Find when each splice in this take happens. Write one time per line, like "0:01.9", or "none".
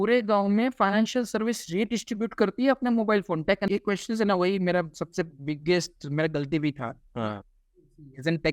0:03.7